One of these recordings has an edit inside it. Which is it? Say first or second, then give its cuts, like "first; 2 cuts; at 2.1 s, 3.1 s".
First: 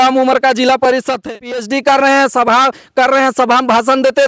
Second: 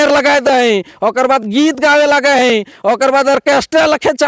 first; 1 cut; at 1.2 s